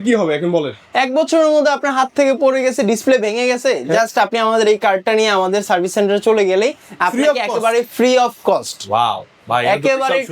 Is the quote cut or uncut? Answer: uncut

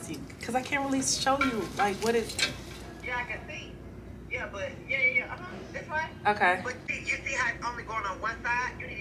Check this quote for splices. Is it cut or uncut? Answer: cut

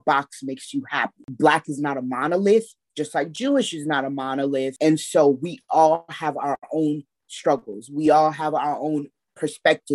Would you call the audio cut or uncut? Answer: cut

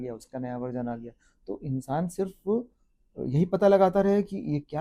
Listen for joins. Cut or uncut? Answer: uncut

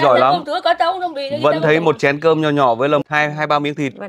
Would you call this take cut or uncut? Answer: cut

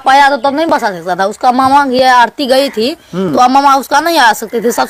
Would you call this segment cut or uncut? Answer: uncut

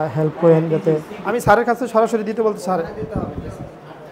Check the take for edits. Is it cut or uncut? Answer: cut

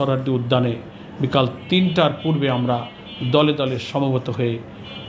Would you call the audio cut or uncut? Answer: uncut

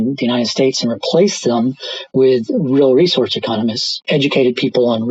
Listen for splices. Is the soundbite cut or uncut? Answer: cut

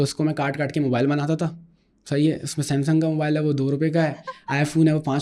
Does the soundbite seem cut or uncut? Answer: uncut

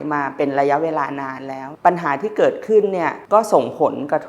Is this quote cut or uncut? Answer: cut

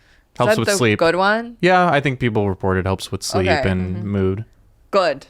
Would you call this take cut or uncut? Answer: uncut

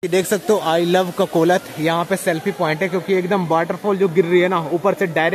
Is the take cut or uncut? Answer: uncut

